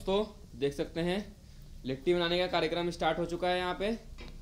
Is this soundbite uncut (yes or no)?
yes